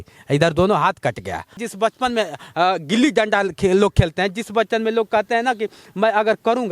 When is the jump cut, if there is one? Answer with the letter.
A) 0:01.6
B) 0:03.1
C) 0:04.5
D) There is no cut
A